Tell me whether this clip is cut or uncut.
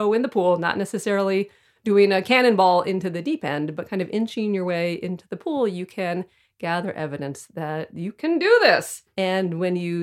cut